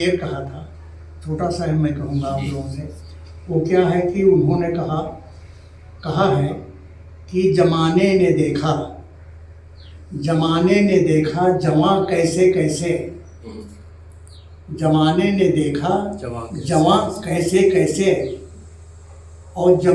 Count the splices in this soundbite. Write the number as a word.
zero